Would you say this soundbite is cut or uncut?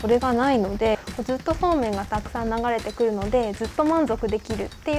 cut